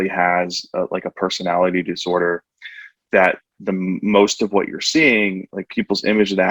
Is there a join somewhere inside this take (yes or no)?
no